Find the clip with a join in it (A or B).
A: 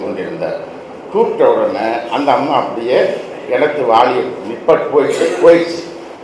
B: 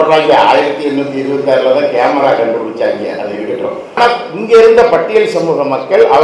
B